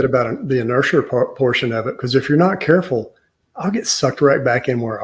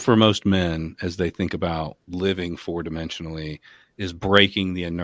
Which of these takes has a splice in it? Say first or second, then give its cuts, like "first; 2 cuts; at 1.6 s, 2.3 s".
second; 1 cut; at 2.0 s